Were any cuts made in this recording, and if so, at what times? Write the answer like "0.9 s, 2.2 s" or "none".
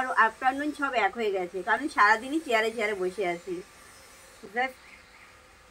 none